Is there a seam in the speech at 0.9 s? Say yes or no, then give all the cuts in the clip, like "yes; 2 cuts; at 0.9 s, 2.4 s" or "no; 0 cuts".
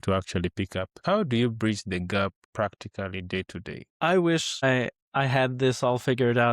yes; 4 cuts; at 0.9 s, 2.4 s, 3.8 s, 4.9 s